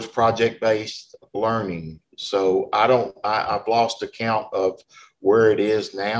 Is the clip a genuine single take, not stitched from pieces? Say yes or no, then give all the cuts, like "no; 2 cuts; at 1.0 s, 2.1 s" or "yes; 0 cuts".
yes; 0 cuts